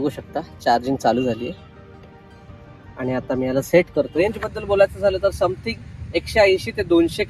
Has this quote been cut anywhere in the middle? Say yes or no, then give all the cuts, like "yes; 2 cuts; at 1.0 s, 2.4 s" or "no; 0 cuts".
yes; 1 cut; at 4.1 s